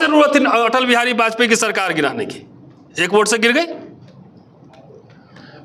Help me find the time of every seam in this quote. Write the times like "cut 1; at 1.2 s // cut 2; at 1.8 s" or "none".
none